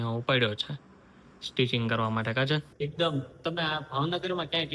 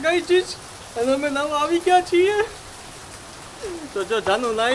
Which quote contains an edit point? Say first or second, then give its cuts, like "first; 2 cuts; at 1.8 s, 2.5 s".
first; 1 cut; at 2.7 s